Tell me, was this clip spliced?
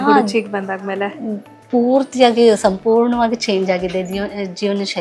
no; 0 cuts

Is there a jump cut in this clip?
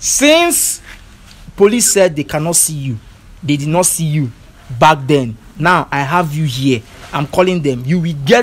no; 0 cuts

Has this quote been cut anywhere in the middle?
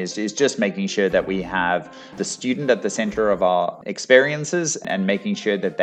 yes; 3 cuts; at 2.2 s, 3.8 s, 4.8 s

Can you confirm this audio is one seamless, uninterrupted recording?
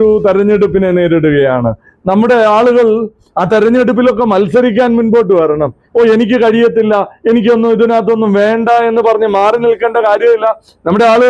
yes; 0 cuts

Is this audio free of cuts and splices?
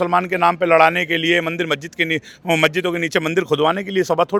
yes; 0 cuts

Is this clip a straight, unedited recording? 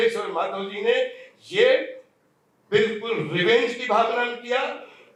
yes; 0 cuts

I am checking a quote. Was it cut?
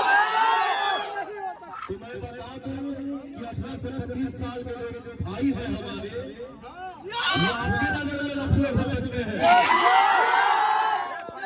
no; 0 cuts

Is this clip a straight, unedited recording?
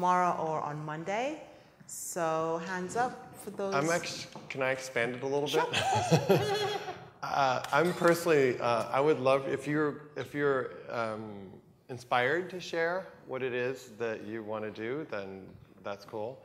yes; 0 cuts

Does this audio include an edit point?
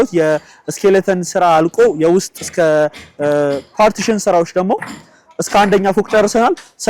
no; 0 cuts

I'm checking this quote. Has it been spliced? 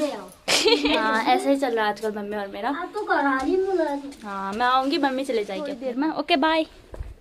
yes; 2 cuts; at 0.8 s, 5.8 s

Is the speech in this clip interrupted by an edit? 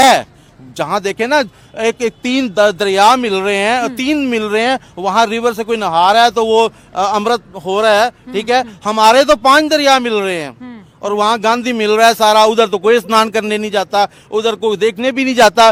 no; 0 cuts

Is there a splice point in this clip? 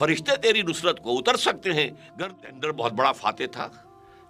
yes; 1 cut; at 2.0 s

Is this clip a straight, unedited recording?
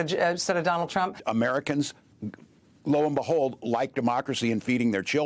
no; 1 cut; at 1.2 s

